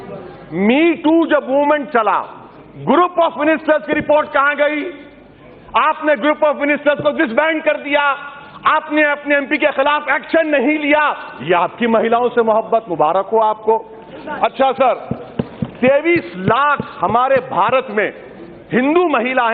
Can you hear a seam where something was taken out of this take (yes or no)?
no